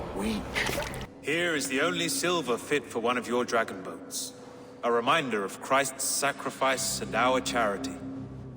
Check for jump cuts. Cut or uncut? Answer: cut